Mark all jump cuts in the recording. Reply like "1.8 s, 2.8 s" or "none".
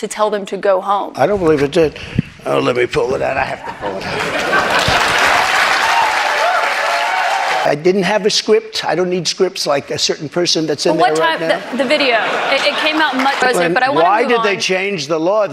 7.7 s, 13.5 s